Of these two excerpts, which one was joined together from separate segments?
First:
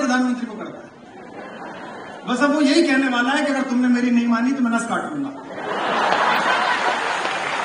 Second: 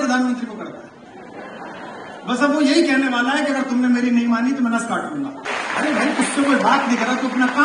second; 1 cut; at 5.5 s

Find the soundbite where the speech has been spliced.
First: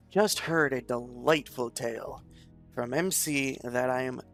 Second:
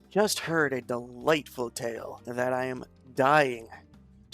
second; 1 cut; at 2.2 s

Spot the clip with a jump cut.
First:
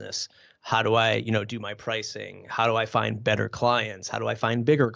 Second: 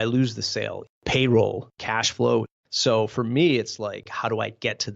second; 4 cuts; at 0.9 s, 1.7 s, 2.6 s, 4.1 s

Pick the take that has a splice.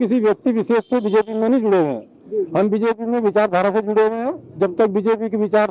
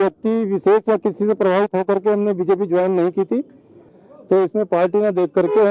second; 1 cut; at 3.8 s

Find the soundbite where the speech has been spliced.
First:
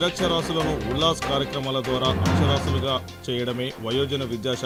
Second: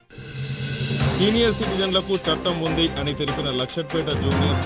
second; 1 cut; at 1.0 s

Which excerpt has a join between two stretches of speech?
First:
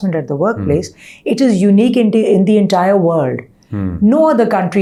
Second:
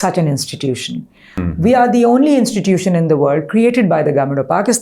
second; 1 cut; at 1.3 s

